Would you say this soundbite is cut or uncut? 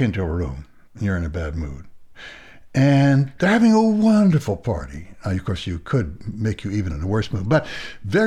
uncut